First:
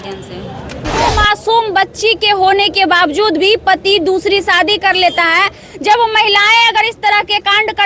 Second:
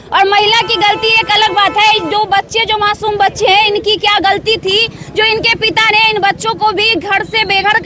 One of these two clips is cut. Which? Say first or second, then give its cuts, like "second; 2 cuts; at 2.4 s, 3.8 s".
first; 1 cut; at 1.0 s